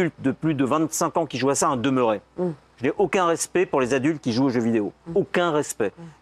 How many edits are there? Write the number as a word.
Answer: zero